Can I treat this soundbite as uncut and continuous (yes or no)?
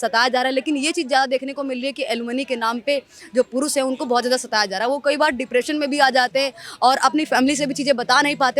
yes